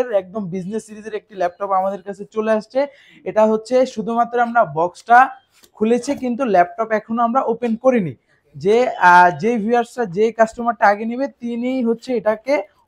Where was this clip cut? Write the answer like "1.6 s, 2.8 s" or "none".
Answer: none